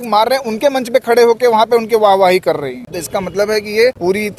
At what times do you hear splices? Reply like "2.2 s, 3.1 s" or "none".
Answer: none

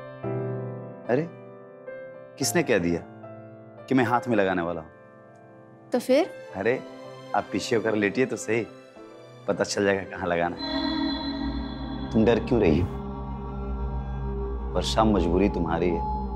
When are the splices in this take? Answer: 10.7 s

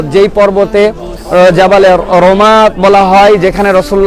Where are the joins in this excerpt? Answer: none

